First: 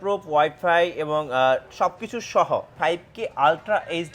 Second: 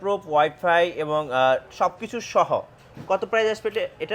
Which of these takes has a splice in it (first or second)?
first